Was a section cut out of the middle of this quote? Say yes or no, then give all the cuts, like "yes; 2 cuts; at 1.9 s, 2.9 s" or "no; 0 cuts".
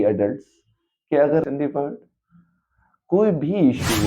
yes; 1 cut; at 1.5 s